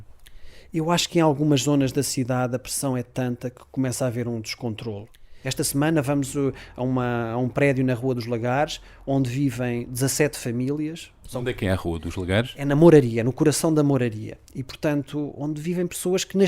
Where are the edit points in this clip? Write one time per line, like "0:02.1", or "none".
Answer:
0:05.3